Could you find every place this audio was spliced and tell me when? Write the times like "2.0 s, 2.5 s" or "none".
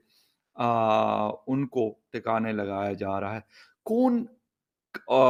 none